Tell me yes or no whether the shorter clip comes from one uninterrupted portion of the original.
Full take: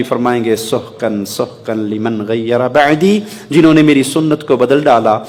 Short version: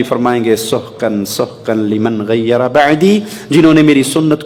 yes